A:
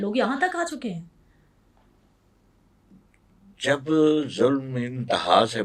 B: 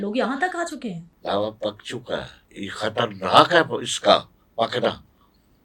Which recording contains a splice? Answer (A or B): B